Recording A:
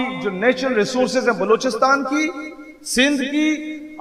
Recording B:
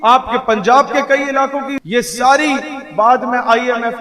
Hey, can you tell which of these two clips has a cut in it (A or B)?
B